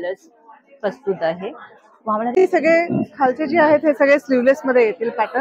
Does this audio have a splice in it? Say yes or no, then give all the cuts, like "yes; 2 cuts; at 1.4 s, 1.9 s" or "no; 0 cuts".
yes; 1 cut; at 2.4 s